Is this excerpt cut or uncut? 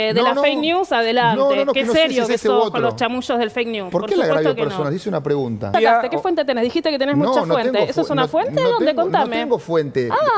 cut